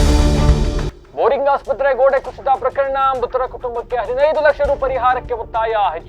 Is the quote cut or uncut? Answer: uncut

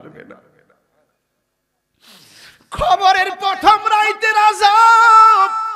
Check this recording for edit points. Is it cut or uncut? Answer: uncut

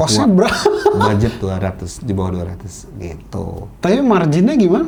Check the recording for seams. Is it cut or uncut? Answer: uncut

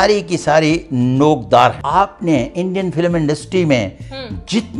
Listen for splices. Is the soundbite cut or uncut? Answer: cut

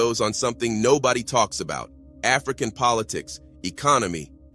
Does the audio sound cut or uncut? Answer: uncut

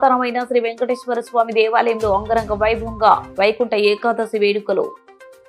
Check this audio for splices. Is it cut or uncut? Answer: uncut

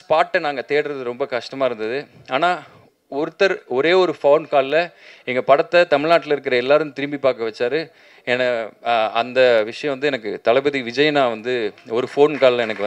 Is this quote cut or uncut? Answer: uncut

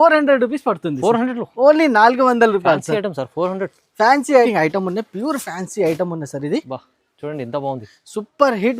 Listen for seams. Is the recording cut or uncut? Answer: cut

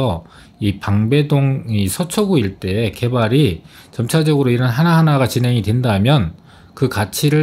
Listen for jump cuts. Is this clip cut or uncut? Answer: uncut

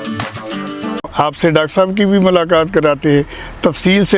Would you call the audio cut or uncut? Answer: cut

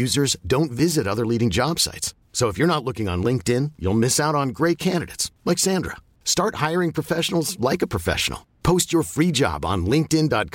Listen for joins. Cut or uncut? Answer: uncut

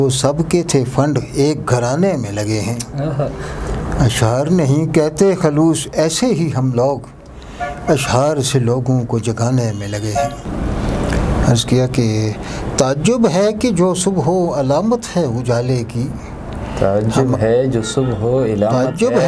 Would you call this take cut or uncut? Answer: cut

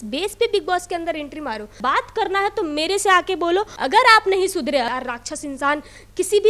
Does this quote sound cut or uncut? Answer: cut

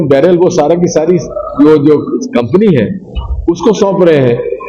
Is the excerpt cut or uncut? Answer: uncut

